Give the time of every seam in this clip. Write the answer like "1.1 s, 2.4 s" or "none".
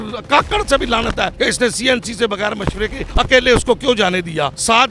none